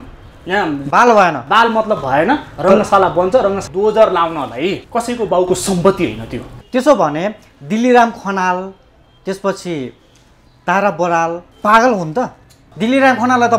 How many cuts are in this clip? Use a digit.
4